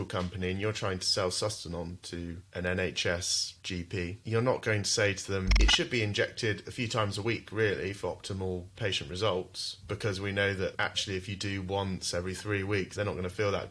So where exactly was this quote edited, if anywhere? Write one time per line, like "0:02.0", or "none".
none